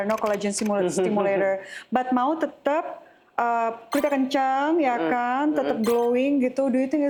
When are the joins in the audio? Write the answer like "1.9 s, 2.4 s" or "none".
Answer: none